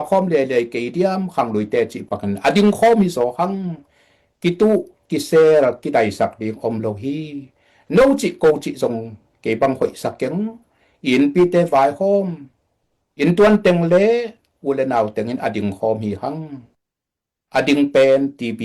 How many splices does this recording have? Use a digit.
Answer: 0